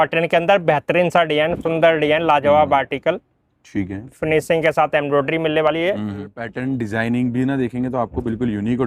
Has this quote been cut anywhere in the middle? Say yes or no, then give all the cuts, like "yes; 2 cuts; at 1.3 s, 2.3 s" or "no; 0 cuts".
yes; 1 cut; at 6.4 s